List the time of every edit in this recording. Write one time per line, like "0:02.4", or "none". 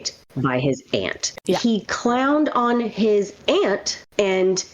0:01.3